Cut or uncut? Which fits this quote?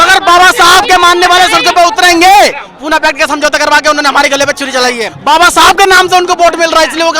cut